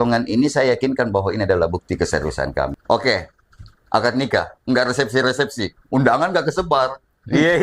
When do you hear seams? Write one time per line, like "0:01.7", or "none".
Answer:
0:02.8